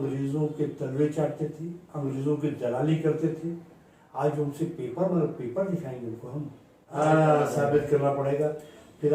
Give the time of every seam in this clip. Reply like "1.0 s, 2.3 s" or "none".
7.0 s